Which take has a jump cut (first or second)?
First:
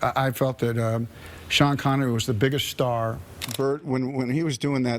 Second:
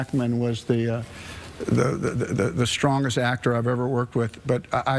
first